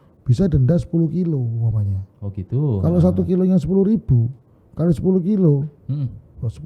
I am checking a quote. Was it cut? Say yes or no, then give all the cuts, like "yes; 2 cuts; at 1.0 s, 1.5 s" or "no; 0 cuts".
no; 0 cuts